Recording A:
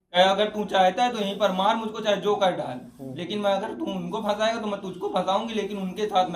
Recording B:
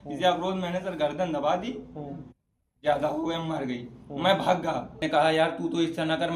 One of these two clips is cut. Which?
B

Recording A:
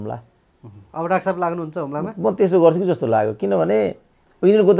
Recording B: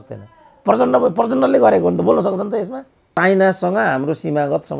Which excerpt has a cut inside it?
B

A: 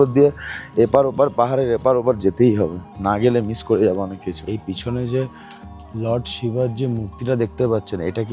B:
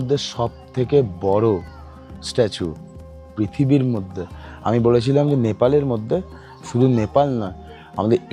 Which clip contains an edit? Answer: A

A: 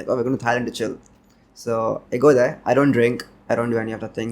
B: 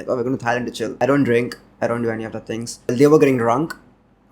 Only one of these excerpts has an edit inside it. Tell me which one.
B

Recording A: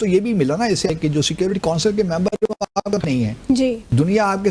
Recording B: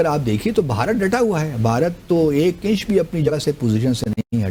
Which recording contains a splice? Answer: A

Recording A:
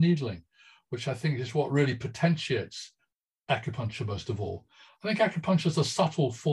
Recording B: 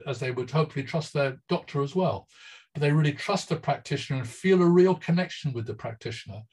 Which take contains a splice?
B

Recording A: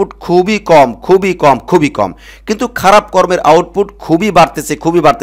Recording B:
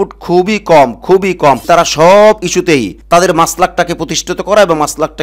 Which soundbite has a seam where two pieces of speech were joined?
B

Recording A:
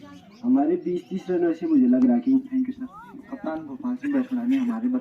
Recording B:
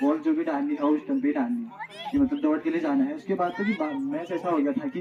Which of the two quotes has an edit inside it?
A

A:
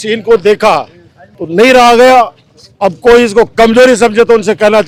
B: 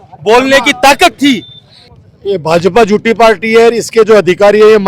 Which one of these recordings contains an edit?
B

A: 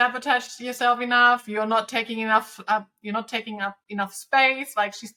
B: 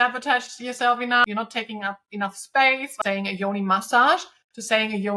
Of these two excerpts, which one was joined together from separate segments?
B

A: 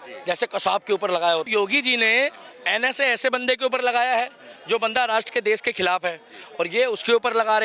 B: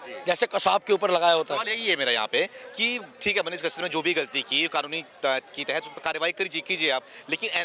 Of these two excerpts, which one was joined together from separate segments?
A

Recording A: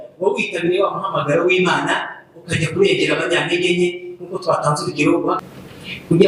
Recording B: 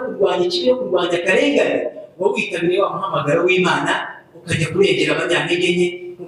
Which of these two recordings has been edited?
A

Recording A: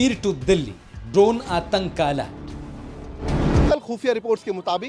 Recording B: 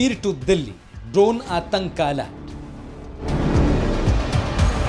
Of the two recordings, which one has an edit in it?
A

